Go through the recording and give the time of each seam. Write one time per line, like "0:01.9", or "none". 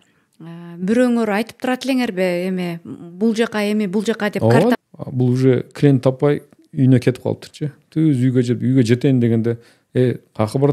0:04.8